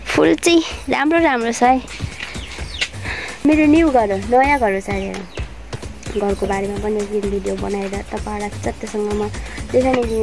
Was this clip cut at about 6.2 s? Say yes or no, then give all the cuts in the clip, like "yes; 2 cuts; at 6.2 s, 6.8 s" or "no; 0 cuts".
no; 1 cut; at 3.4 s